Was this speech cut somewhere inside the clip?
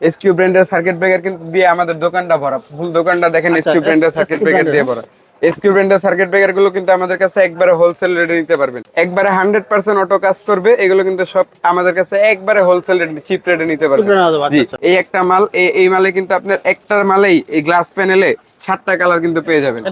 yes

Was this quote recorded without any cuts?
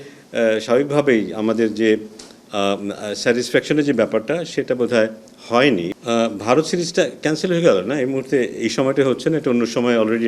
no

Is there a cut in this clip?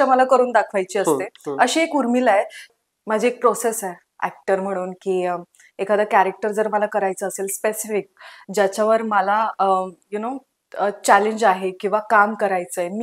yes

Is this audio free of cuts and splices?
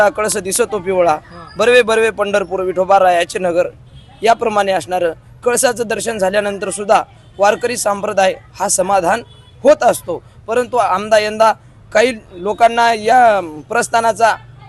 yes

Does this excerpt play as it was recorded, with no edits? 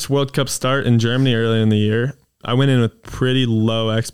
no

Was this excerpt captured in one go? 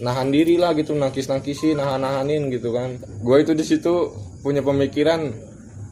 no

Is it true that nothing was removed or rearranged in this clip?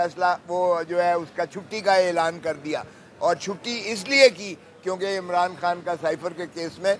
yes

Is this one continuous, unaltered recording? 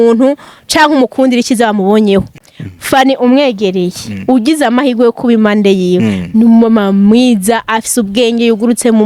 no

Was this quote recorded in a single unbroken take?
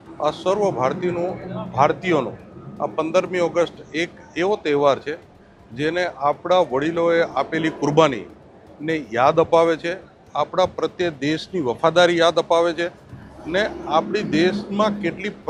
yes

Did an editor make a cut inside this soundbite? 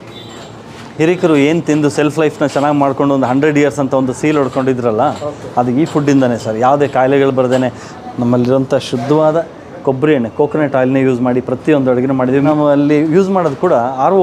yes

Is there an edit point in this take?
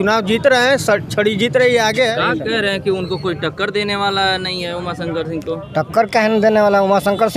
yes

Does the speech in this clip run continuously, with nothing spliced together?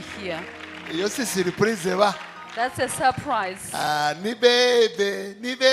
yes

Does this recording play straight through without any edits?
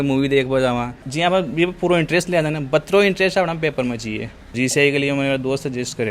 no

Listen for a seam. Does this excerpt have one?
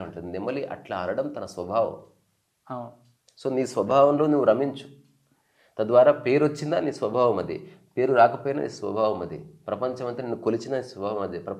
no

